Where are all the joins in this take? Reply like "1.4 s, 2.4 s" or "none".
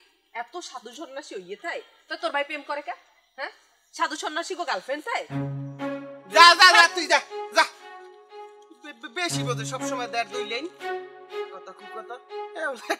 none